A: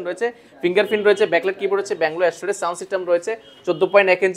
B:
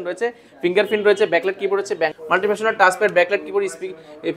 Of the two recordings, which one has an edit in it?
B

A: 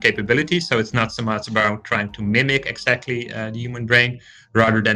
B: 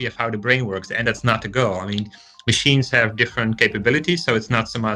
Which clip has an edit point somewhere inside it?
B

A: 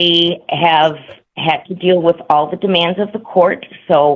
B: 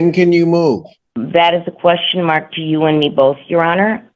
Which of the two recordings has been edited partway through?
B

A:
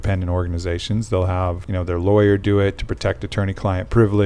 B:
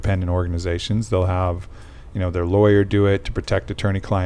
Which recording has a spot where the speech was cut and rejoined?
A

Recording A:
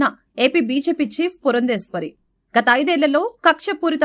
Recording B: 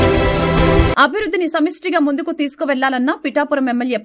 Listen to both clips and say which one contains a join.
B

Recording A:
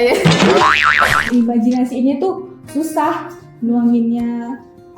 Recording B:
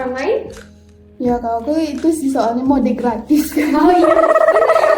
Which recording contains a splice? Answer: A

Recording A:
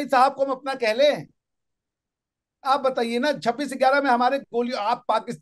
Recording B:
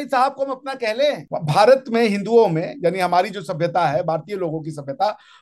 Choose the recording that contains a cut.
B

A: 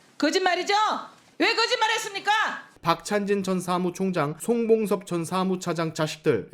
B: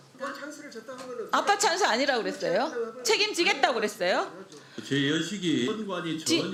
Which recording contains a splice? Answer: A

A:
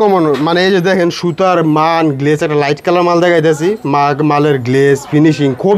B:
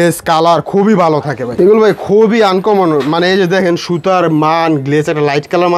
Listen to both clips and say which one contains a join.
B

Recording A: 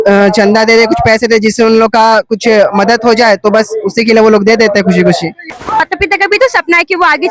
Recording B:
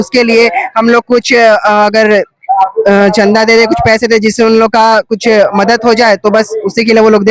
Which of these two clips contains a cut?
A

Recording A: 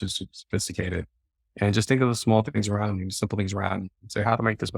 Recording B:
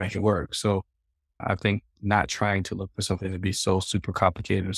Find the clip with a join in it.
B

